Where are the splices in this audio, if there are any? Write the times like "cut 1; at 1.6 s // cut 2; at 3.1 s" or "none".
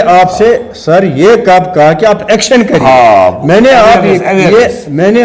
none

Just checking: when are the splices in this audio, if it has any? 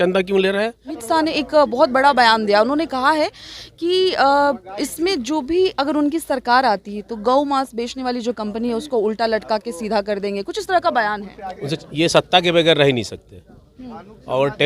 cut 1; at 1.0 s // cut 2; at 11.8 s

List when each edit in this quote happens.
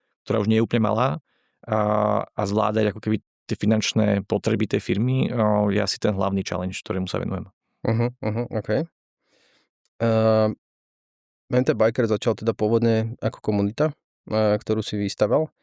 none

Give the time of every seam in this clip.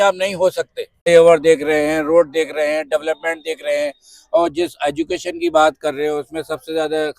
cut 1; at 1.1 s

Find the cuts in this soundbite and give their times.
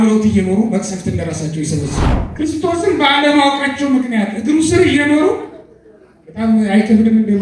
cut 1; at 2.1 s

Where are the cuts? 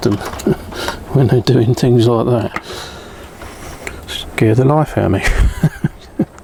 none

